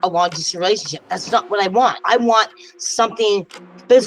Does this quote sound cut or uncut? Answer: cut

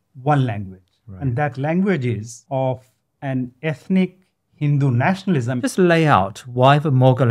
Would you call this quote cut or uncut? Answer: cut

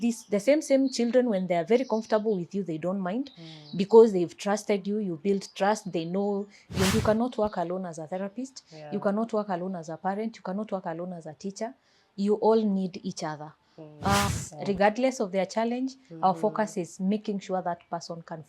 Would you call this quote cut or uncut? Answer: cut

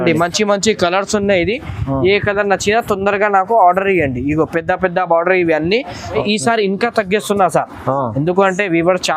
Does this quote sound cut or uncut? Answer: cut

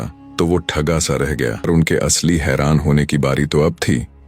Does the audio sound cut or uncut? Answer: cut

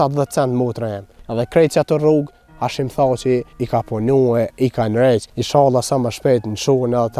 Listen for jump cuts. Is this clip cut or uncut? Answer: cut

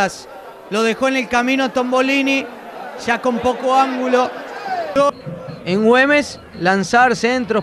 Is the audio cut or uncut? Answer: cut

